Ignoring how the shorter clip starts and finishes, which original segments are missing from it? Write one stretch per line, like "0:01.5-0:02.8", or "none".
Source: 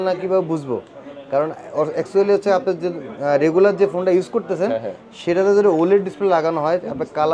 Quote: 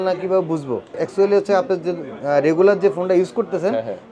0:01.0-0:02.0